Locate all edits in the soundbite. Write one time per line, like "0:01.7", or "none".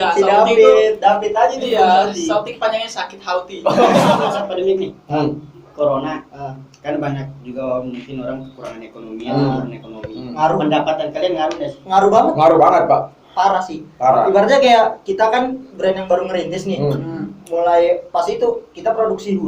0:04.2